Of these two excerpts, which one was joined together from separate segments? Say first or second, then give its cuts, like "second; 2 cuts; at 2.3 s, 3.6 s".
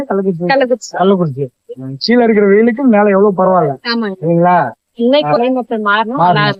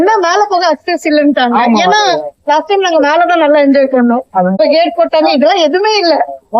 second; 1 cut; at 4.6 s